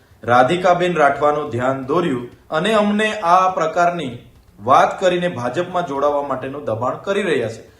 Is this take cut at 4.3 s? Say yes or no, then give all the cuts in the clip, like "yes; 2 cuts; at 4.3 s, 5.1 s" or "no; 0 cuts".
no; 1 cut; at 2.3 s